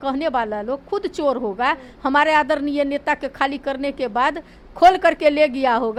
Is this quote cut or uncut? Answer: uncut